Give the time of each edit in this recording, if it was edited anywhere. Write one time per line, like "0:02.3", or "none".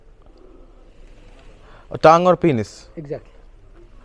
none